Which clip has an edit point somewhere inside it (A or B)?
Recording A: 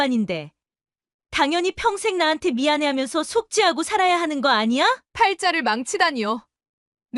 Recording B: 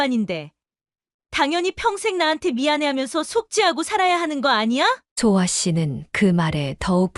A